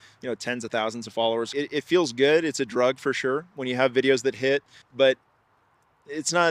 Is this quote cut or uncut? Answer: cut